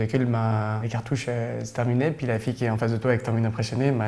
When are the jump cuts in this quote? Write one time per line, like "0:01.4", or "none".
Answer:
0:00.9